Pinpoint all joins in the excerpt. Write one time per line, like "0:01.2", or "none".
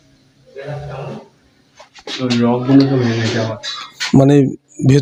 none